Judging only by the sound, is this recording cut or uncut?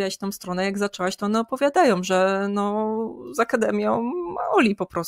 uncut